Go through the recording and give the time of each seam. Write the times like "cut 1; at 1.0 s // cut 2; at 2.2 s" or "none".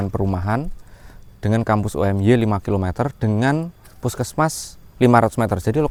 none